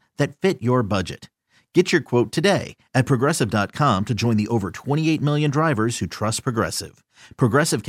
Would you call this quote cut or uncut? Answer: uncut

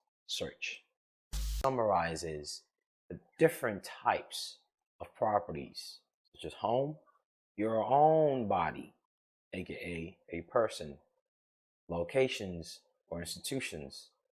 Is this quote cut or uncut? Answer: cut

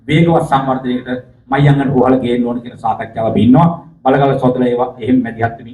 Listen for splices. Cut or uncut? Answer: uncut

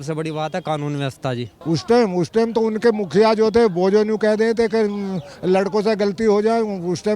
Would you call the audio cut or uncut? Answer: cut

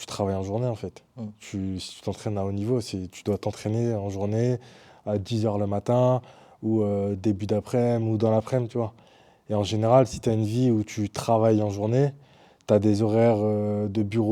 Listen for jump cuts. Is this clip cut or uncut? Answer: uncut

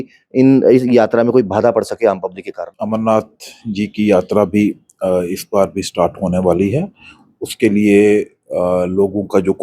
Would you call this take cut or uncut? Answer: cut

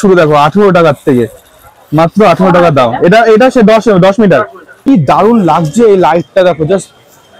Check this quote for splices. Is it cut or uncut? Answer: cut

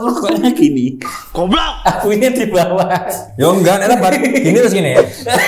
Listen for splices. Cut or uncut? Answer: uncut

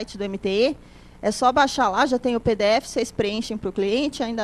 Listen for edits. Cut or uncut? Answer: uncut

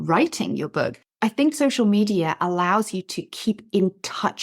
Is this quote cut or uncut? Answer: cut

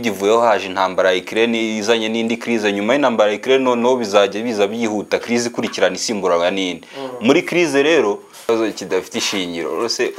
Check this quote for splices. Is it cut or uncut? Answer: cut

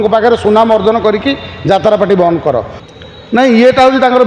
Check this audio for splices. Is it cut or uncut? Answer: cut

